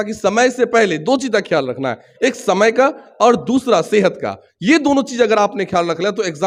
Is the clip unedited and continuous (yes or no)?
yes